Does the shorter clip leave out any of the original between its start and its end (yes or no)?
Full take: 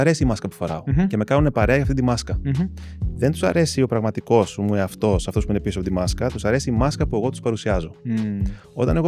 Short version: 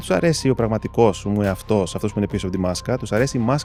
no